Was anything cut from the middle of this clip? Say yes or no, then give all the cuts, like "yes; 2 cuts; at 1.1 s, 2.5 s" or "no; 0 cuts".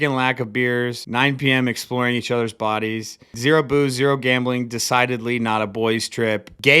yes; 1 cut; at 1.0 s